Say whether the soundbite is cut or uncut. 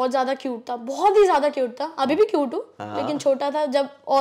uncut